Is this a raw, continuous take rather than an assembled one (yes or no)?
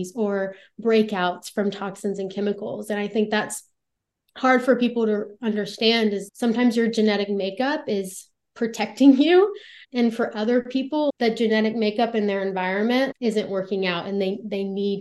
no